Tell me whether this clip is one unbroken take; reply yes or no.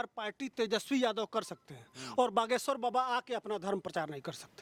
yes